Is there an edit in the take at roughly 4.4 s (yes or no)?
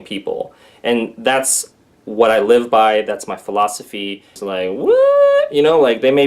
yes